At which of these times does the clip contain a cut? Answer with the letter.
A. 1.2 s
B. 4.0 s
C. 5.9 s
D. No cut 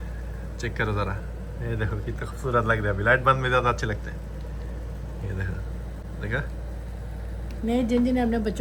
D